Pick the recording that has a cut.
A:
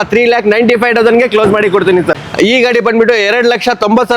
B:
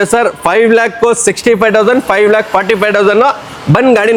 A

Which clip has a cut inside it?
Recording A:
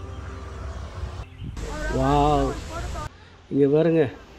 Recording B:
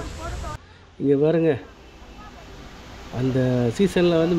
A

